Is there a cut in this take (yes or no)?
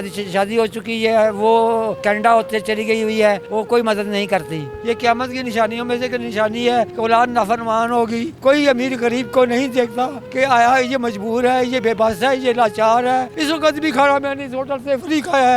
yes